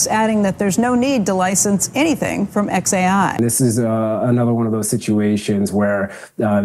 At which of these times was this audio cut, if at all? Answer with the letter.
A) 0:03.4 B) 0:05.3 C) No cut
A